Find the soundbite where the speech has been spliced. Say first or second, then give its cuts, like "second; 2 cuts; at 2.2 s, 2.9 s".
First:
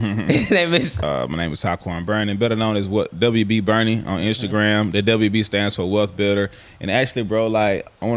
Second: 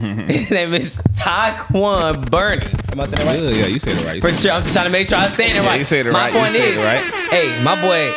first; 1 cut; at 1.0 s